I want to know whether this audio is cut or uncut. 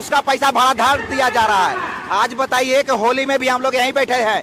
uncut